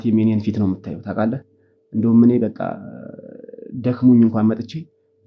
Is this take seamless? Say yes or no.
yes